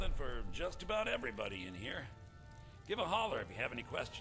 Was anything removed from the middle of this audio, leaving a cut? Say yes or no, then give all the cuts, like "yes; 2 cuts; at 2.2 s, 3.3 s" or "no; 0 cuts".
no; 0 cuts